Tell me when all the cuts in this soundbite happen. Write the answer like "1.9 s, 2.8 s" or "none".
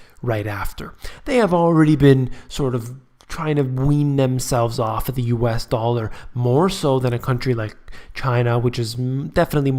none